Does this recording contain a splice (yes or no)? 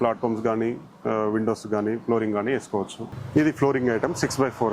yes